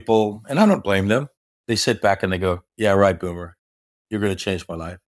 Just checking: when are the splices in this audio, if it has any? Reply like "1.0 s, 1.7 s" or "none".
none